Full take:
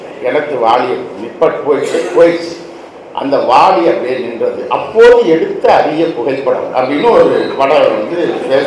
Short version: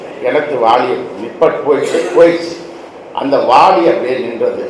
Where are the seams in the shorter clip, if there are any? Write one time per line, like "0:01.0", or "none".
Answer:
none